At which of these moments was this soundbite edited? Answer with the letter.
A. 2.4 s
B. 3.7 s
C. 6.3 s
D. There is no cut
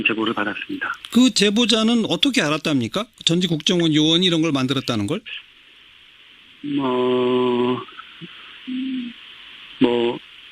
C